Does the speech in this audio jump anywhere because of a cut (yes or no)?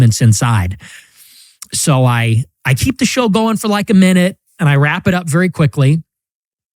no